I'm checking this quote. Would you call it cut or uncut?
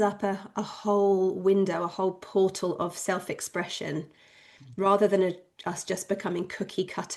uncut